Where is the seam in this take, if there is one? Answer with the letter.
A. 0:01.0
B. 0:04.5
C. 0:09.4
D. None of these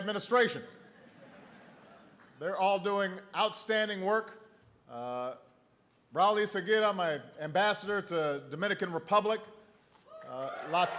D